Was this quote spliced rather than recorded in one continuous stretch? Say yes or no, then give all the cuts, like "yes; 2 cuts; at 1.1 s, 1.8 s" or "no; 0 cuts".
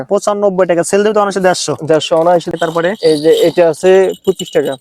yes; 1 cut; at 2.5 s